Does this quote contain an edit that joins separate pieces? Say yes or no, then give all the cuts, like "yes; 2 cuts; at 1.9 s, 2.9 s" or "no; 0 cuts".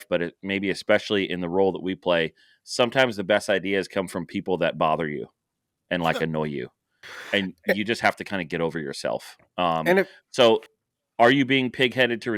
no; 0 cuts